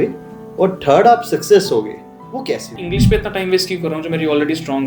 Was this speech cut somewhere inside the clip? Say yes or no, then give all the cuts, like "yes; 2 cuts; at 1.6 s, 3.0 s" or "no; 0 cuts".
yes; 1 cut; at 2.7 s